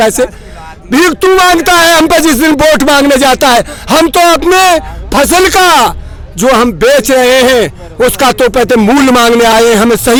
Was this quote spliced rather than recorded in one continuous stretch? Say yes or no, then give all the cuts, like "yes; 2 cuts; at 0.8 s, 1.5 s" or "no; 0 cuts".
no; 0 cuts